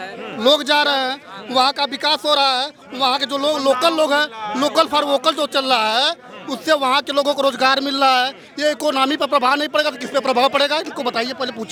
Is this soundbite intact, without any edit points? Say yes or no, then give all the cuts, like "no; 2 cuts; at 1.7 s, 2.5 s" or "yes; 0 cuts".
yes; 0 cuts